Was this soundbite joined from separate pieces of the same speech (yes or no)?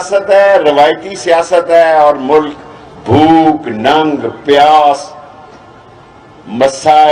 no